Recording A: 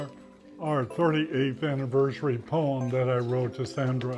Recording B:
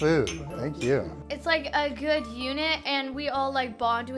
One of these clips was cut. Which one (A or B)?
B